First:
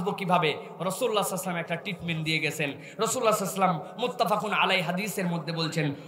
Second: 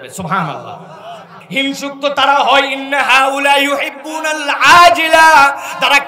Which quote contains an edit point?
second; 1 cut; at 1.4 s

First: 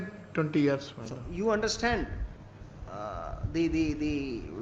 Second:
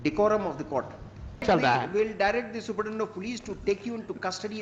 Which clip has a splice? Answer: second; 1 cut; at 1.4 s

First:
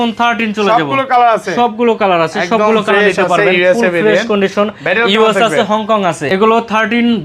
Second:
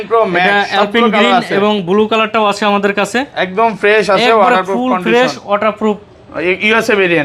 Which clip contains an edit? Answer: first; 1 cut; at 6.2 s

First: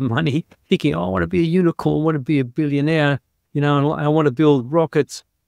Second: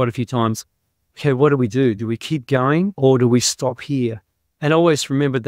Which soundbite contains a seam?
second; 1 cut; at 2.9 s

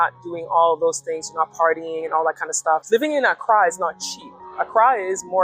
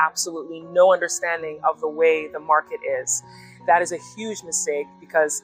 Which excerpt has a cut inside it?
first; 1 cut; at 2.8 s

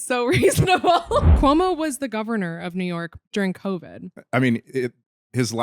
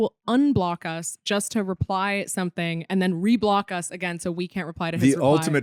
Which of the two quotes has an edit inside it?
first; 1 cut; at 1.3 s

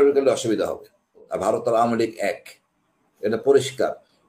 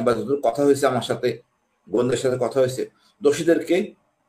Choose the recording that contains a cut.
first; 1 cut; at 1.3 s

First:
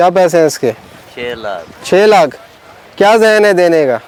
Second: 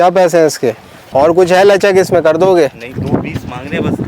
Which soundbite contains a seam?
second; 1 cut; at 1.0 s

